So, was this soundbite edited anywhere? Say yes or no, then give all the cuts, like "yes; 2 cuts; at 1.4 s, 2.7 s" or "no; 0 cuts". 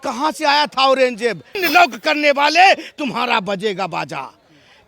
yes; 1 cut; at 1.6 s